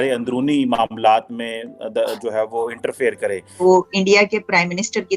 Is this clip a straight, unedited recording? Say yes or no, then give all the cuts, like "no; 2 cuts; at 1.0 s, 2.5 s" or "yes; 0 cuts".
no; 1 cut; at 3.5 s